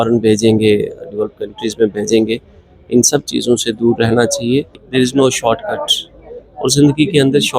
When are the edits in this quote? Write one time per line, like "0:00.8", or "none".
0:04.8